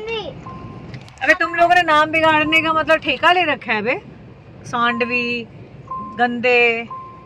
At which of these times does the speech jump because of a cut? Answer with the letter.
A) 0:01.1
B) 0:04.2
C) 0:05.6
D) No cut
D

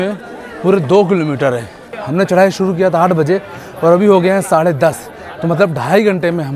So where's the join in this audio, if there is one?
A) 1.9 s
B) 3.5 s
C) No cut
A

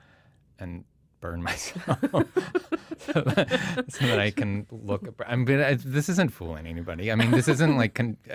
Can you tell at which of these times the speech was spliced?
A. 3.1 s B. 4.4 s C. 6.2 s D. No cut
D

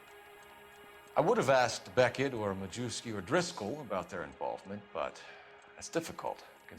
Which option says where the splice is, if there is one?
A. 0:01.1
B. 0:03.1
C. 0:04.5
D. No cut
A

